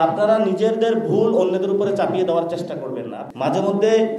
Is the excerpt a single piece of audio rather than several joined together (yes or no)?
no